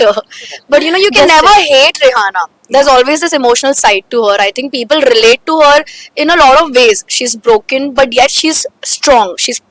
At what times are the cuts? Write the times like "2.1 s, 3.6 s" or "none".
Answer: none